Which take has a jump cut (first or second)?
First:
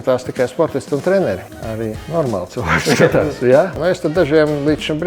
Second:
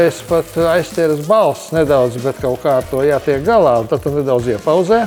first